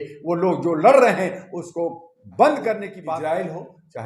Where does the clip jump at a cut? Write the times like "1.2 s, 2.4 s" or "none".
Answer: 2.9 s